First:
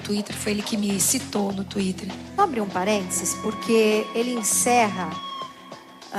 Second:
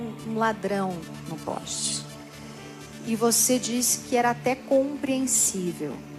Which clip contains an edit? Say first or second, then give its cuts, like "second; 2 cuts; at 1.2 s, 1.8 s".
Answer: second; 1 cut; at 1.0 s